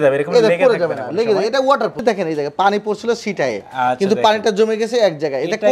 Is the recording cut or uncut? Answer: cut